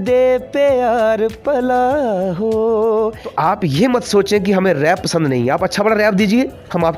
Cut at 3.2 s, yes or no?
yes